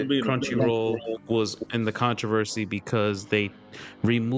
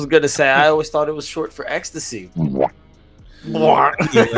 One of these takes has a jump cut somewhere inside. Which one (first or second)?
second